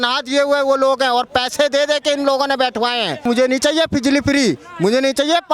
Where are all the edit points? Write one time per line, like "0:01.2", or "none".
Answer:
0:03.2